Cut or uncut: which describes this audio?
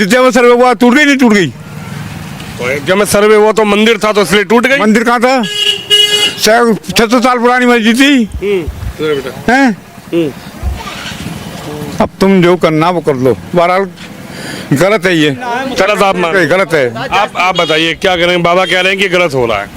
uncut